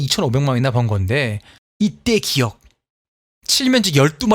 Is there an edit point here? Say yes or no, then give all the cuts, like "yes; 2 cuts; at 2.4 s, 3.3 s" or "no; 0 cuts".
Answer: no; 0 cuts